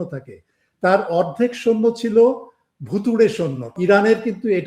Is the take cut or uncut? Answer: cut